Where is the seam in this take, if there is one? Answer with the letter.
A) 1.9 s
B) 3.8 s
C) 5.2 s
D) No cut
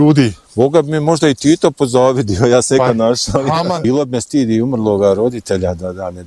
B